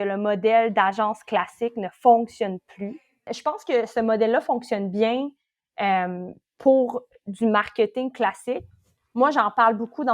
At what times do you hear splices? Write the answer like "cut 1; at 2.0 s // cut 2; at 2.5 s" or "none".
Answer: cut 1; at 3.3 s